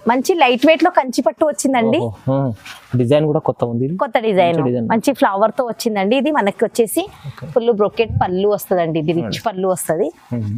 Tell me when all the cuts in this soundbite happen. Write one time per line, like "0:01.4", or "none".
none